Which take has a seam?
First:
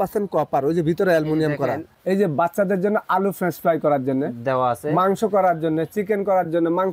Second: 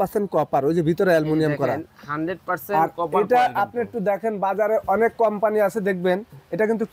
first; 1 cut; at 1.9 s

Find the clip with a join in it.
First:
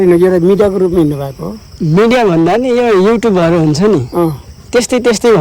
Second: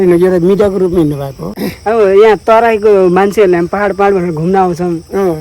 second; 1 cut; at 1.6 s

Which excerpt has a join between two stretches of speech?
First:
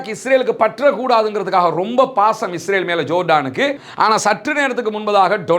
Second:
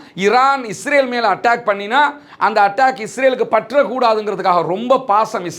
first; 1 cut; at 3.8 s

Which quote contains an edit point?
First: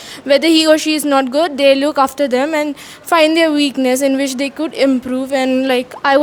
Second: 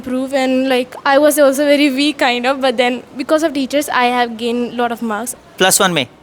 second; 1 cut; at 5.3 s

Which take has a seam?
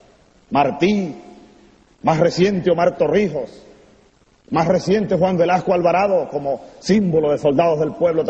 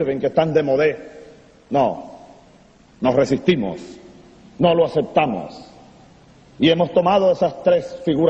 first; 1 cut; at 6.0 s

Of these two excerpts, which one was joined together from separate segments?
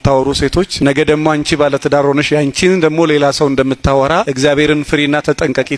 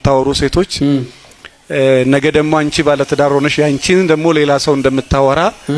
first; 2 cuts; at 0.8 s, 4.3 s

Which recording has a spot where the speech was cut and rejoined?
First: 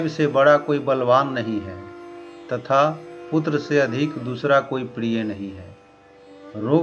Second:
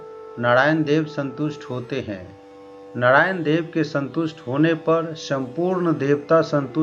second; 1 cut; at 2.6 s

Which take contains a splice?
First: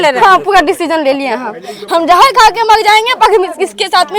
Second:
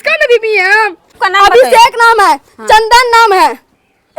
second; 1 cut; at 1.2 s

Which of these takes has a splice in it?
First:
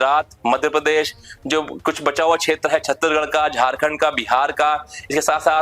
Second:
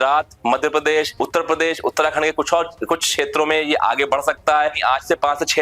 second; 2 cuts; at 1.1 s, 4.8 s

